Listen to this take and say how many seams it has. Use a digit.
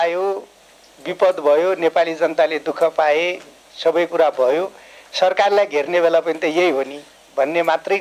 0